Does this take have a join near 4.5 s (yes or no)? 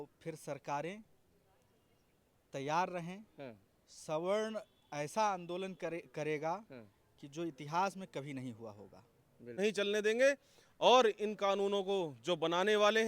no